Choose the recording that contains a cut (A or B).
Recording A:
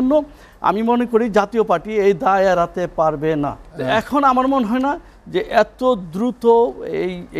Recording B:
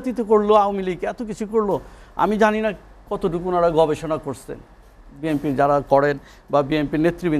A